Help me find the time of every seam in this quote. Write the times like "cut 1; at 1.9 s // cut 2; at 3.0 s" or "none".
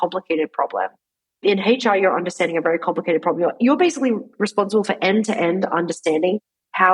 cut 1; at 1.4 s